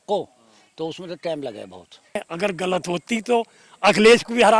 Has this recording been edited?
yes; 1 cut; at 2.2 s

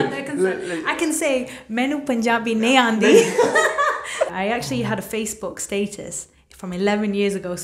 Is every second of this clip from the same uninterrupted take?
no; 1 cut; at 4.3 s

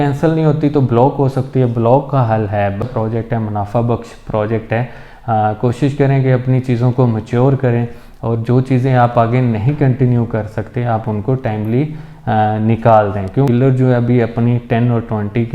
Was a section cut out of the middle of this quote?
yes; 2 cuts; at 2.8 s, 13.5 s

